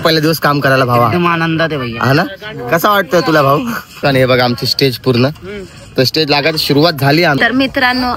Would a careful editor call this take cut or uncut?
cut